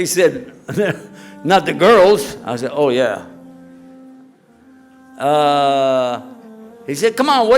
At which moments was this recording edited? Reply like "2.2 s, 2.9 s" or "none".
none